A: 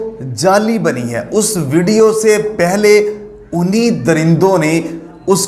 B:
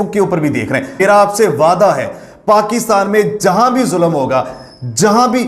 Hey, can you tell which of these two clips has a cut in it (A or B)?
B